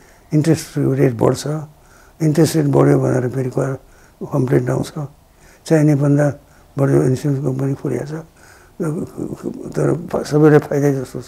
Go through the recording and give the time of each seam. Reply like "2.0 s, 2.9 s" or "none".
5.3 s